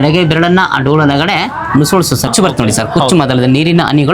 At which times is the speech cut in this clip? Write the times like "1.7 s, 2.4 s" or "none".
2.3 s